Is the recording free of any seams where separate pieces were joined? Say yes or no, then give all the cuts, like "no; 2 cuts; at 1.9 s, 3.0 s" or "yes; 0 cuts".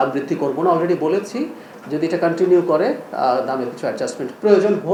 yes; 0 cuts